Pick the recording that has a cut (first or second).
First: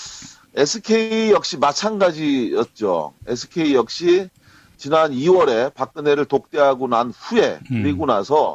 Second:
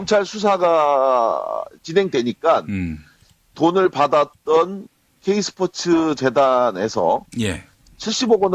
second